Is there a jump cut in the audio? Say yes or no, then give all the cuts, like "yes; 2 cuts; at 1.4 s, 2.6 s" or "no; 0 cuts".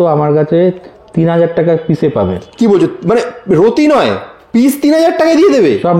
no; 0 cuts